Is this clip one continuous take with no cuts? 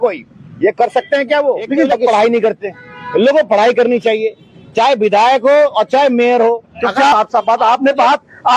no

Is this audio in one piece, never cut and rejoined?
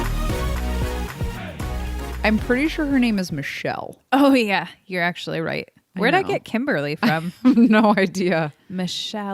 no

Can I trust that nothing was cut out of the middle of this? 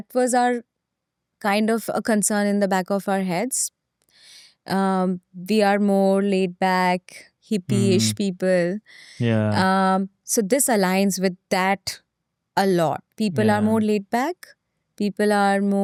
yes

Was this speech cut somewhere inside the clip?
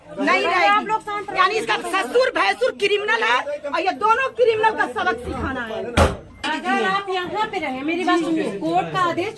yes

